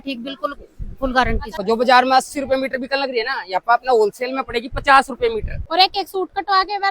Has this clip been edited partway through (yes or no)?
yes